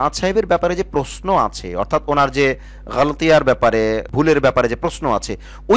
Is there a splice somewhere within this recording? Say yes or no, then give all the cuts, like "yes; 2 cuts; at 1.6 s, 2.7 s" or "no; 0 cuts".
no; 0 cuts